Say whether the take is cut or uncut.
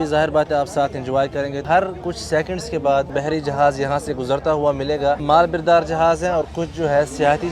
cut